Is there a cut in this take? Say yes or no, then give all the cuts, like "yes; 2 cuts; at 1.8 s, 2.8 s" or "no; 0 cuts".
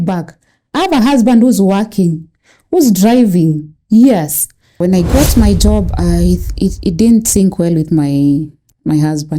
yes; 1 cut; at 4.8 s